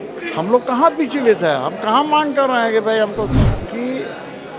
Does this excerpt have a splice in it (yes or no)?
yes